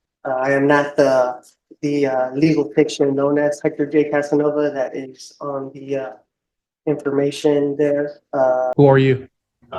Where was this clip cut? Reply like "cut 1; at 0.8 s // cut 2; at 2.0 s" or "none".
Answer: cut 1; at 8.7 s